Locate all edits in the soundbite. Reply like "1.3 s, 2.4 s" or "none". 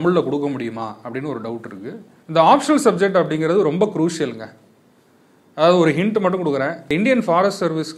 2.1 s, 6.8 s